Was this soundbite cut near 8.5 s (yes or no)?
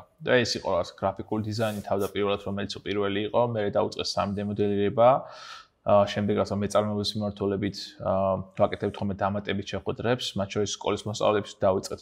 no